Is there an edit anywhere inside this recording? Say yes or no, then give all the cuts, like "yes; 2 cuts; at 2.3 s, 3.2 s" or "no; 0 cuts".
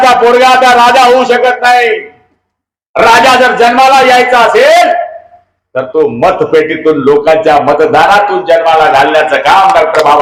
no; 0 cuts